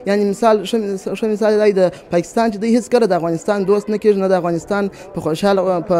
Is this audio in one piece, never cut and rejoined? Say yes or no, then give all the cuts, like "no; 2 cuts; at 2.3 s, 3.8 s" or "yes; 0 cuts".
yes; 0 cuts